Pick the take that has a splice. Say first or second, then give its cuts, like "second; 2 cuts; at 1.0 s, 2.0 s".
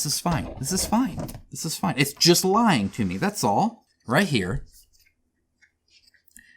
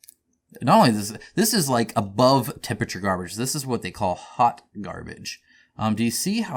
first; 1 cut; at 3.9 s